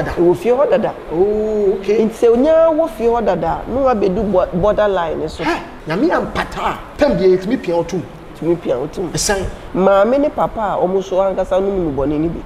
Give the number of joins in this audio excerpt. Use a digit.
4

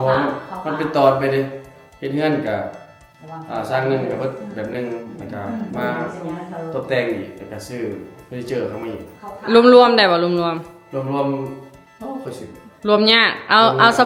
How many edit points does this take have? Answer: 0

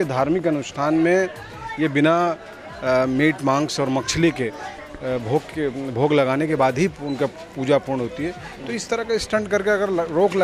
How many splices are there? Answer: 0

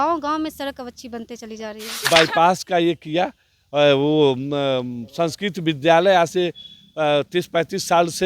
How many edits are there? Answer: 1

